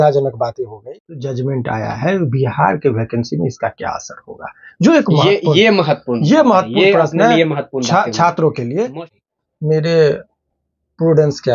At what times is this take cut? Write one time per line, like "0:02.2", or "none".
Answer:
0:00.9
0:09.1